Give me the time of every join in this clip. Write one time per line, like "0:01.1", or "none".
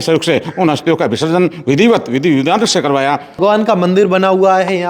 0:03.4